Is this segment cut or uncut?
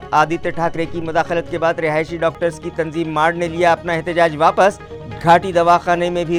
uncut